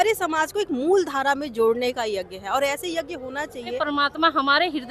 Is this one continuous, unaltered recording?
no; 1 cut; at 3.8 s

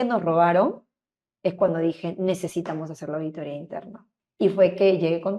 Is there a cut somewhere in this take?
yes; 1 cut; at 4.0 s

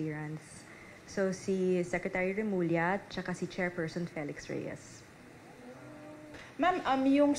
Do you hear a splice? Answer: yes; 1 cut; at 6.4 s

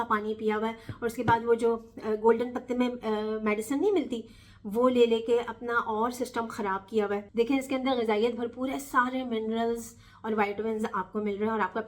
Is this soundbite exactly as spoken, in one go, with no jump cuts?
no; 1 cut; at 7.3 s

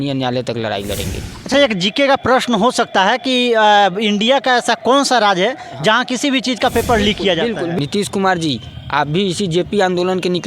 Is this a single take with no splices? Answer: no; 2 cuts; at 1.5 s, 7.7 s

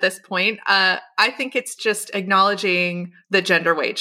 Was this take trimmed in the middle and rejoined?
yes; 2 cuts; at 1.7 s, 3.1 s

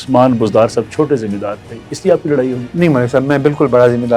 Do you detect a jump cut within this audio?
no; 0 cuts

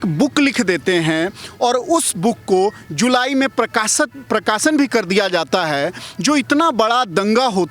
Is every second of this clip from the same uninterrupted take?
yes; 0 cuts

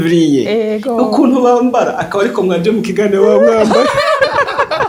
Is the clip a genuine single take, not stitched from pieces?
yes; 0 cuts

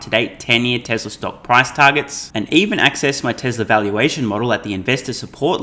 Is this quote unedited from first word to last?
yes; 0 cuts

